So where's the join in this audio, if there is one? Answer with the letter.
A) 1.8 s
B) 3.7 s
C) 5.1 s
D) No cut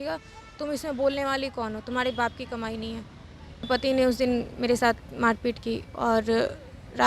B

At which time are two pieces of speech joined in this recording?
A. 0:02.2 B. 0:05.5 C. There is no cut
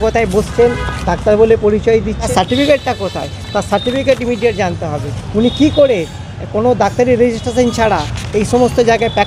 A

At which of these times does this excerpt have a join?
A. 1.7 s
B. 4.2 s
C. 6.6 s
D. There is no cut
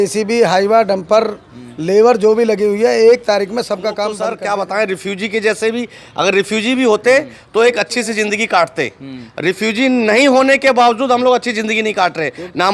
B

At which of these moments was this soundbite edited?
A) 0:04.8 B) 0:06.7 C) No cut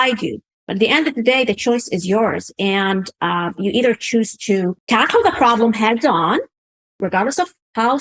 A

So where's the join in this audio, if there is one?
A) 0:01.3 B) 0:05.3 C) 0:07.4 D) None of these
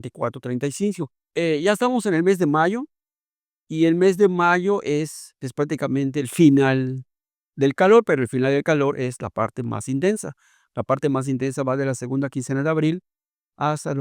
A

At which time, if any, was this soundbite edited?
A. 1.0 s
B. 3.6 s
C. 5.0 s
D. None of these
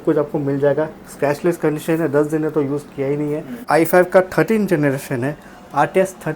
B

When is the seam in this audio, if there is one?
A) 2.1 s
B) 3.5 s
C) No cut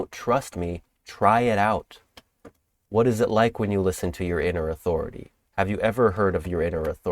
C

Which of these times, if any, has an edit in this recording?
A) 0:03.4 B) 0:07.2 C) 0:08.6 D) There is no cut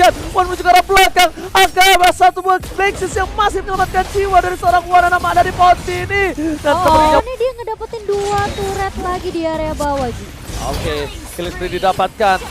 B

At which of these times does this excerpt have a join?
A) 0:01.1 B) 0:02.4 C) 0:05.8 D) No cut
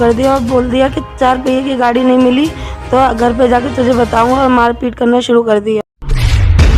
C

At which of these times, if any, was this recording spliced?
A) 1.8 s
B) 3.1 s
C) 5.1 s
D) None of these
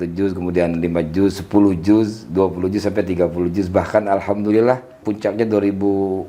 C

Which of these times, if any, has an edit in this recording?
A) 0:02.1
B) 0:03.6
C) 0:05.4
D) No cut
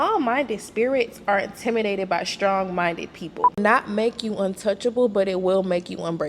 B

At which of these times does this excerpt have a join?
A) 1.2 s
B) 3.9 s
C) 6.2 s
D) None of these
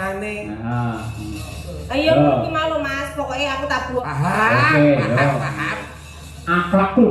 B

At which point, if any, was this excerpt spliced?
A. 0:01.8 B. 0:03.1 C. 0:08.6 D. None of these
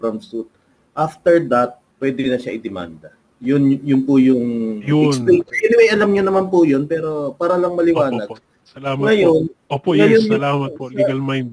A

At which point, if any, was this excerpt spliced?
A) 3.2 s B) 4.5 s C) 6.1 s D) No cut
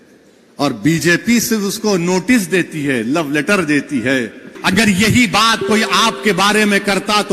B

